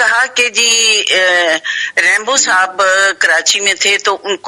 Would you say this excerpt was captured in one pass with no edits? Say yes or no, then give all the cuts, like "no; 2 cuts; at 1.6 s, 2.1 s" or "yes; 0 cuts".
yes; 0 cuts